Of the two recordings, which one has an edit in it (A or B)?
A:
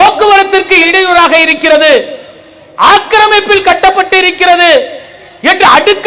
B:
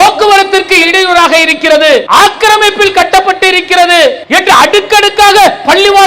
B